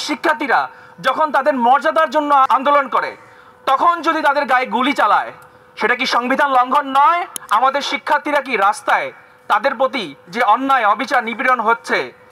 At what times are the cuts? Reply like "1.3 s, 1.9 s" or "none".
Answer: 2.5 s, 7.4 s